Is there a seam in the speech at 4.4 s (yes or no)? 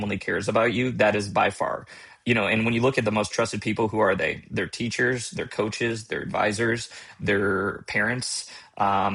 no